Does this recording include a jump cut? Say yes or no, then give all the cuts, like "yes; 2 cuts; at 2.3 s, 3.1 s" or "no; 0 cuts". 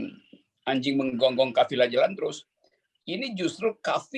no; 0 cuts